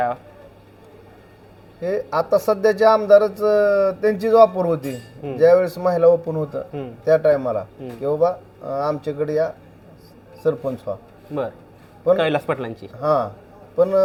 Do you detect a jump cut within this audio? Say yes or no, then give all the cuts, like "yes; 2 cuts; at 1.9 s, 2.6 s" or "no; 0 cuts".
no; 0 cuts